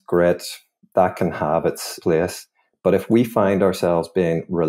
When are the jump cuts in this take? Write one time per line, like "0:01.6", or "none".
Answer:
0:01.9

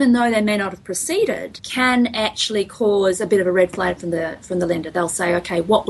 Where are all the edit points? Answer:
0:01.6

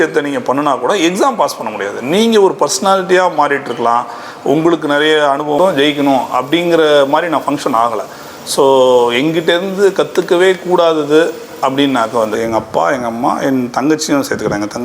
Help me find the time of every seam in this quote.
0:05.6
0:12.4

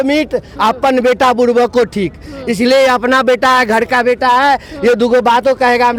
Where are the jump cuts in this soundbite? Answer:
none

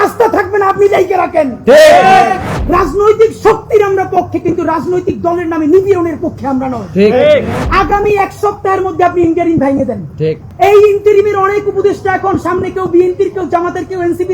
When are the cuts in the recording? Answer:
0:02.5
0:07.6
0:10.4

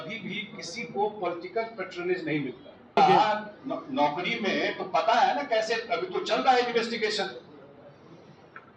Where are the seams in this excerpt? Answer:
0:03.0

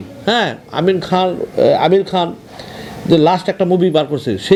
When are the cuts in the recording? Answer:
none

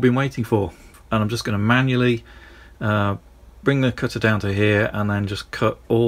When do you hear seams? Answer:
0:01.0

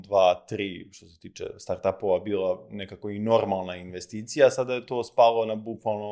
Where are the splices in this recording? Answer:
none

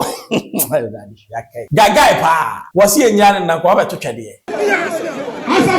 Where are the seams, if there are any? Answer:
0:01.6
0:02.6
0:04.5

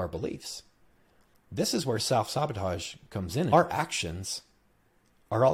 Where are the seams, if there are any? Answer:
0:03.5

